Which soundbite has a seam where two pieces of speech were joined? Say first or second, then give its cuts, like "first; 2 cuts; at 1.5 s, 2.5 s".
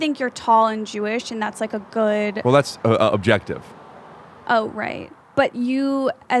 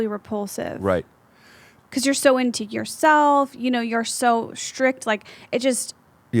second; 1 cut; at 1.8 s